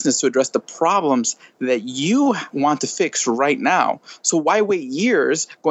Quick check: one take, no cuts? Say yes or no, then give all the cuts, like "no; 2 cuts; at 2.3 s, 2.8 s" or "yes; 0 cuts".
no; 1 cut; at 2.5 s